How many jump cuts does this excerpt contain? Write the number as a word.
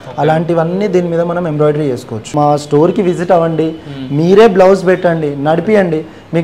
one